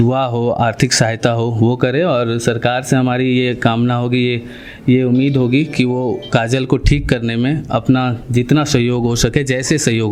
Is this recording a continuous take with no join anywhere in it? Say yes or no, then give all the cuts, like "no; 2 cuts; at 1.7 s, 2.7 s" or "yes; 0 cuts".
yes; 0 cuts